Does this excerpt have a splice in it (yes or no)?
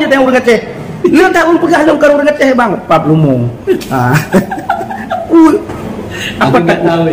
no